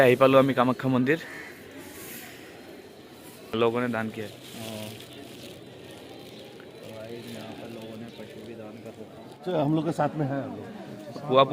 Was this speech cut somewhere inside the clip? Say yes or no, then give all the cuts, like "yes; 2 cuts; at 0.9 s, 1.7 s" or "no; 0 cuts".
no; 0 cuts